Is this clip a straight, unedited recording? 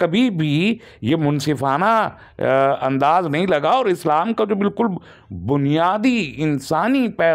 yes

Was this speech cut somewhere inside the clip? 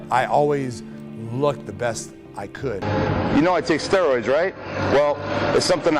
no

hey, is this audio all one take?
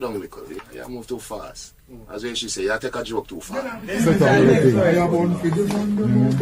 no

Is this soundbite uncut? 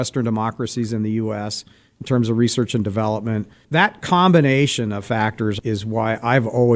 yes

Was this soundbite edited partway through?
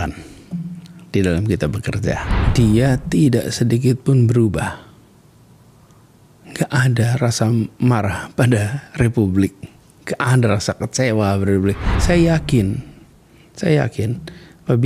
yes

